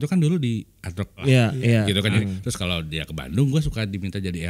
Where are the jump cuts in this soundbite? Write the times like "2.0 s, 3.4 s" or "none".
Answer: 1.1 s, 2.2 s